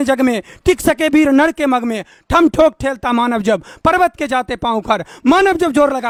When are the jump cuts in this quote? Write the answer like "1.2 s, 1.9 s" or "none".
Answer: none

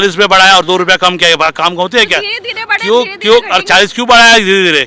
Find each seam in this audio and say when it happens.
none

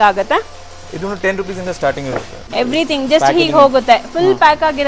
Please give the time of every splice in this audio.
2.4 s

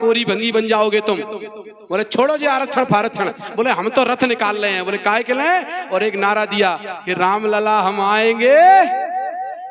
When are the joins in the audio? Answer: none

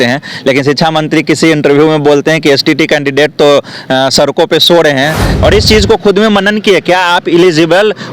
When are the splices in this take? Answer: 5.2 s

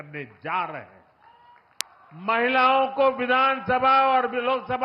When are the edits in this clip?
1.8 s

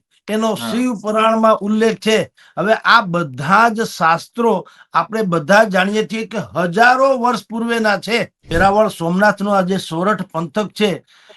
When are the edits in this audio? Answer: 8.5 s

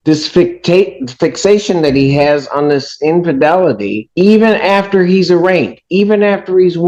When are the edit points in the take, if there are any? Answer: none

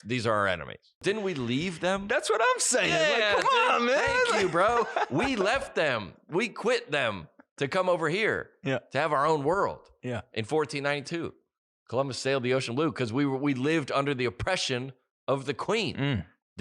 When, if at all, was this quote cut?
1.0 s

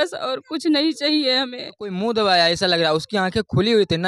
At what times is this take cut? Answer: 1.9 s

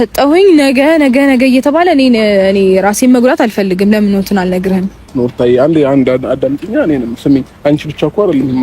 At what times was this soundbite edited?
5.1 s

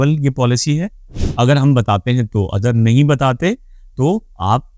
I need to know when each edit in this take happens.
1.2 s

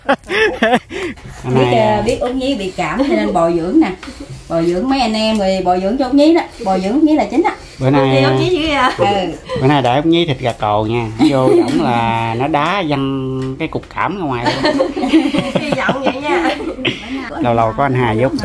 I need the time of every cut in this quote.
1.1 s, 17.3 s

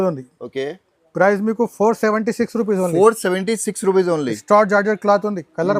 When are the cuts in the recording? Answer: none

